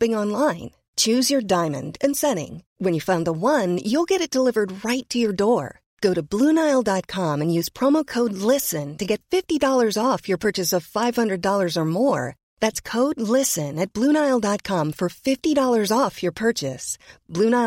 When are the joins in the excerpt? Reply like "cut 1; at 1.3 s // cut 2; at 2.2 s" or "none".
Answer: none